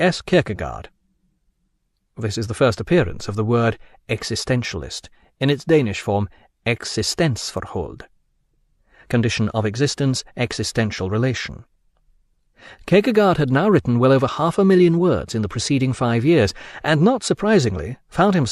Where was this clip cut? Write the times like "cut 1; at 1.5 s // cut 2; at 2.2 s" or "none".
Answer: cut 1; at 6.5 s